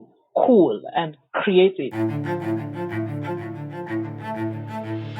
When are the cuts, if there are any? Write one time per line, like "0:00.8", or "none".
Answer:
0:01.9